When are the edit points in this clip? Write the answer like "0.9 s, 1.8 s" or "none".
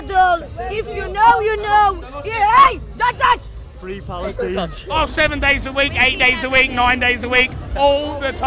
4.9 s